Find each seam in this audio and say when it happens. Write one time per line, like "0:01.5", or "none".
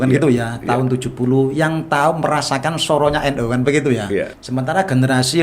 0:04.4